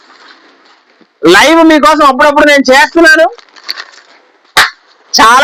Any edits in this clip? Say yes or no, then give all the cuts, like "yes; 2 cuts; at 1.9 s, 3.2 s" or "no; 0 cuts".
no; 0 cuts